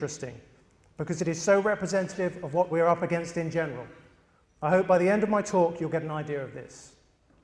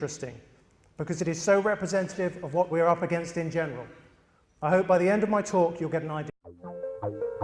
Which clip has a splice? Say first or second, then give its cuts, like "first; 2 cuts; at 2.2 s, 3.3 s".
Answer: first; 1 cut; at 6.3 s